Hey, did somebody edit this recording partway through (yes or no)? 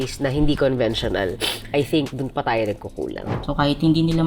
yes